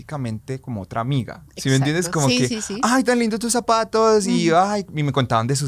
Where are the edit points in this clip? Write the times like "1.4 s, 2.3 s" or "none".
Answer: none